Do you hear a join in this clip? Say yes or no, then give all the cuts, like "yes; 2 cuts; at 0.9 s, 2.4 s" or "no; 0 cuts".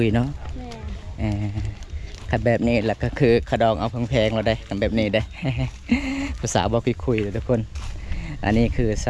no; 0 cuts